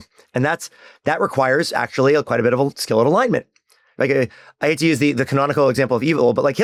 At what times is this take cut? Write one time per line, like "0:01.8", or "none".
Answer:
none